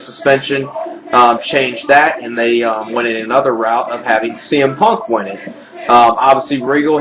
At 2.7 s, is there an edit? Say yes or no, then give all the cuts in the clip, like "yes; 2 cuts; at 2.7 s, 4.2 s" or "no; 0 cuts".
no; 1 cut; at 5.3 s